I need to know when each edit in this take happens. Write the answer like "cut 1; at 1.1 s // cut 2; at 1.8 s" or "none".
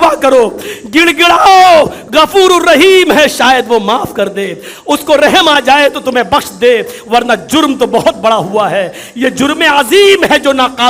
none